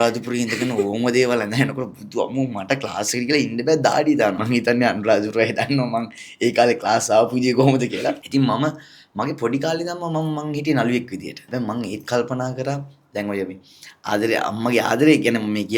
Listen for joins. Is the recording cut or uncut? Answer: cut